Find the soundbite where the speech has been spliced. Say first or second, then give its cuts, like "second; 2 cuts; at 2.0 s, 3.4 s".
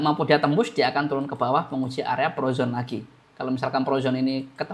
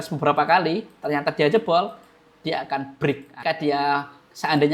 second; 1 cut; at 3.4 s